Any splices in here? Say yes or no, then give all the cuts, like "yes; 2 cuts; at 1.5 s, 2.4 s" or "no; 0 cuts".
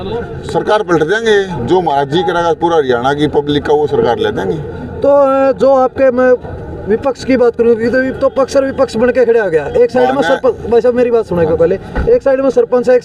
no; 0 cuts